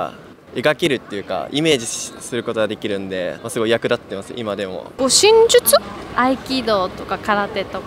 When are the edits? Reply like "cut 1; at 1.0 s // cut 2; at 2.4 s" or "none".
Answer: cut 1; at 3.4 s // cut 2; at 4.8 s